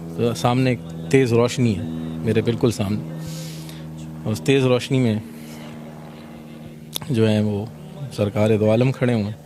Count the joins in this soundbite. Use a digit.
0